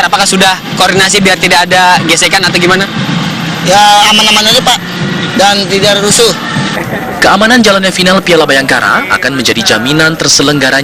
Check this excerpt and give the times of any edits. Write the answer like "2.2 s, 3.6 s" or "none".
5.0 s